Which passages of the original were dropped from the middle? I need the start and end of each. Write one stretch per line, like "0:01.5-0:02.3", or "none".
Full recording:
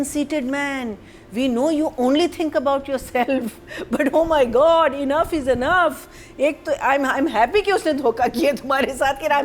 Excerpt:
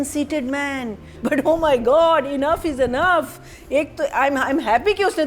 0:01.0-0:03.7